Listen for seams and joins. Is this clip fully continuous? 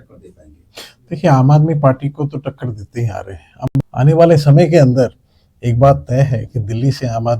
no; 1 cut; at 3.7 s

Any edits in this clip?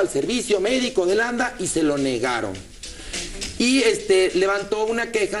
yes; 1 cut; at 3.2 s

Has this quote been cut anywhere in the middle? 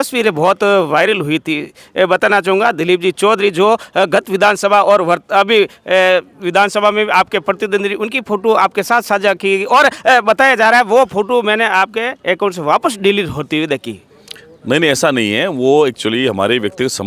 no; 0 cuts

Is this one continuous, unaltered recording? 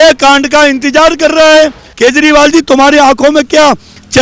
no; 1 cut; at 1.8 s

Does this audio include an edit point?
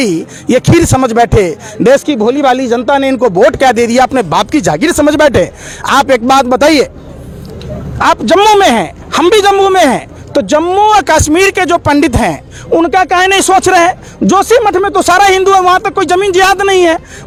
no; 0 cuts

